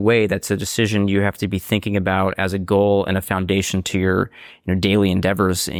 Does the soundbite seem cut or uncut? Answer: uncut